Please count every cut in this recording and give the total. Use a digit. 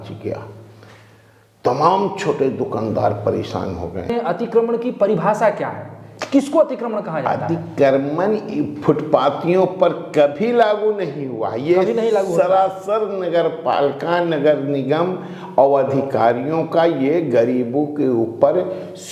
1